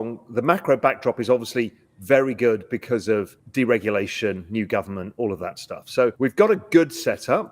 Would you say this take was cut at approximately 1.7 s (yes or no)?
no